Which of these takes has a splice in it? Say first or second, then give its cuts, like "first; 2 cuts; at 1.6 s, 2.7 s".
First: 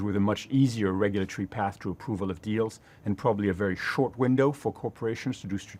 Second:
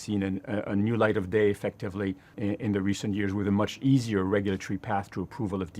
second; 1 cut; at 2.3 s